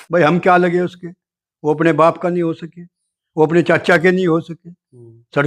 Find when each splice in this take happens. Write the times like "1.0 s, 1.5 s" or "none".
none